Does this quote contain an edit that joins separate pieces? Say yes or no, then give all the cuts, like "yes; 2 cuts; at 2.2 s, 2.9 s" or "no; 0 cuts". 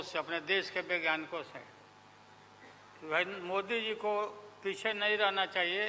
no; 0 cuts